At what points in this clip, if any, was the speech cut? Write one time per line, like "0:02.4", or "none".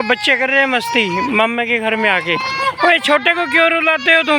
none